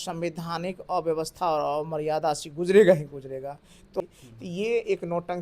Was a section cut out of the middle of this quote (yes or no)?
yes